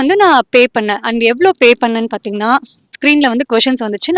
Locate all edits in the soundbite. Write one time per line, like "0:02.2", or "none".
0:02.9